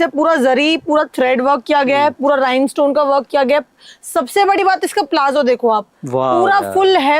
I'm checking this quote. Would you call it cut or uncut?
uncut